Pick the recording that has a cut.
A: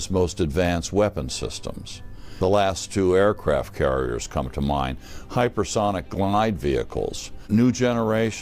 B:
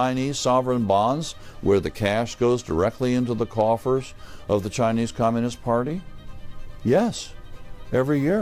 A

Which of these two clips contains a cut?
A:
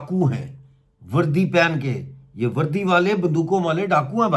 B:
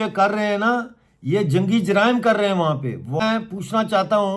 B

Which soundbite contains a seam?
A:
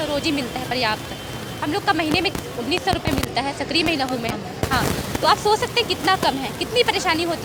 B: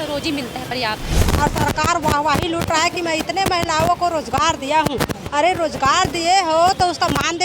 B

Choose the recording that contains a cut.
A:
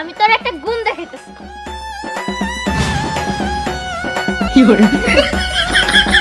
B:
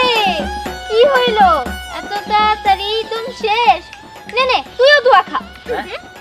A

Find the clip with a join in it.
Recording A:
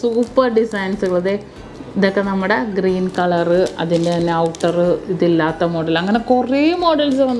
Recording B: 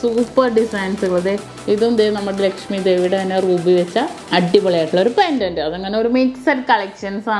B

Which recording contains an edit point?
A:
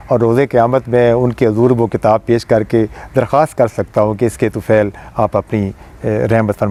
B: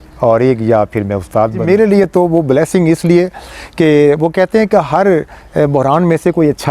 B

